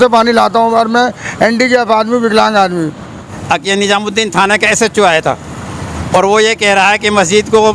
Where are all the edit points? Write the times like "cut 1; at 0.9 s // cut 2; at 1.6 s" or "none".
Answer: cut 1; at 3.2 s